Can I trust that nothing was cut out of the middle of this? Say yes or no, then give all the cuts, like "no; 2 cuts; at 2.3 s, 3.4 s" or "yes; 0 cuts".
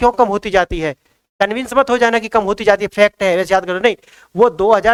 yes; 0 cuts